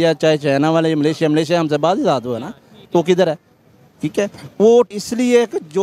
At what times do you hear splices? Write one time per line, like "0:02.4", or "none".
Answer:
0:04.9